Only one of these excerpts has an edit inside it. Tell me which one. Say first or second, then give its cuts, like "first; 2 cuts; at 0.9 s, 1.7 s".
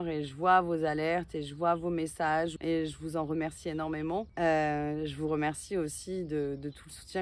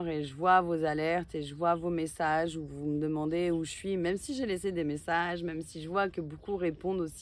first; 2 cuts; at 2.6 s, 4.3 s